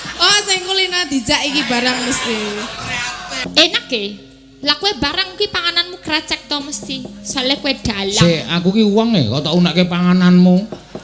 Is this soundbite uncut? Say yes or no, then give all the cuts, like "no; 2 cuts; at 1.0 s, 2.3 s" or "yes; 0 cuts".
no; 1 cut; at 3.4 s